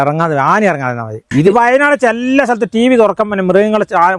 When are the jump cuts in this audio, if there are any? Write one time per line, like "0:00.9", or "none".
0:01.3

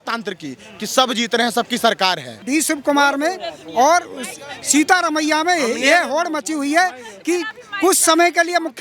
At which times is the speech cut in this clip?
0:02.4

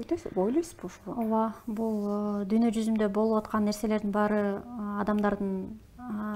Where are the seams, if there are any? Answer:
none

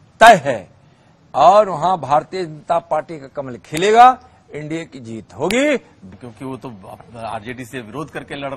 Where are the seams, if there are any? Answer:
0:06.0

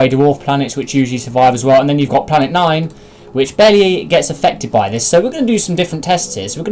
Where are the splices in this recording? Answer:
none

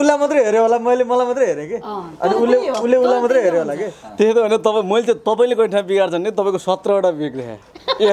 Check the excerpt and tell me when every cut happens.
none

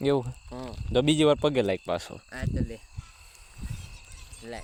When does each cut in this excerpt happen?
none

